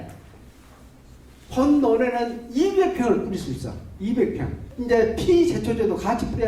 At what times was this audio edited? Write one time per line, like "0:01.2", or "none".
0:04.7